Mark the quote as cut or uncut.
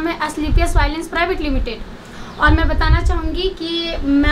uncut